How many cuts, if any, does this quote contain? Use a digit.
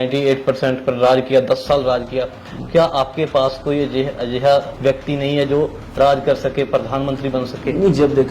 1